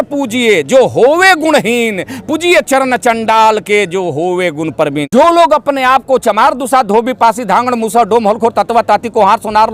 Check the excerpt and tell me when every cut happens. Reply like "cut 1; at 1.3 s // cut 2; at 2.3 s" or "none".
cut 1; at 5.1 s